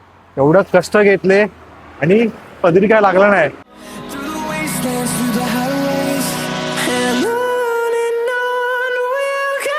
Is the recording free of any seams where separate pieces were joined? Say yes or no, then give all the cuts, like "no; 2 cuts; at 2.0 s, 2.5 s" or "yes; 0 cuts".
no; 1 cut; at 3.6 s